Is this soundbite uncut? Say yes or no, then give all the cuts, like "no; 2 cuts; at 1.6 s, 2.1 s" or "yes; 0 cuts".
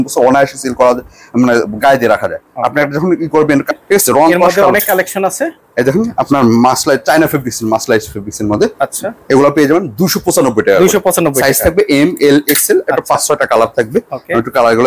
yes; 0 cuts